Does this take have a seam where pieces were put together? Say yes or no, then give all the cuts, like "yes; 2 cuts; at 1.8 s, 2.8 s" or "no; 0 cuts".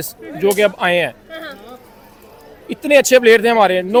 no; 0 cuts